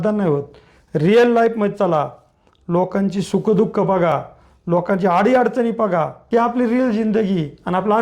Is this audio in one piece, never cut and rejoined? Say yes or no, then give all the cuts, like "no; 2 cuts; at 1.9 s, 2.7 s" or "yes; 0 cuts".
no; 1 cut; at 6.2 s